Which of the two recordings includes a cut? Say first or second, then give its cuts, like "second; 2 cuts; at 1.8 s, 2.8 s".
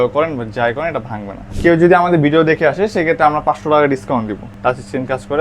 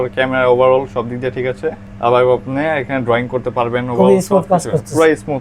first; 2 cuts; at 1.5 s, 4.4 s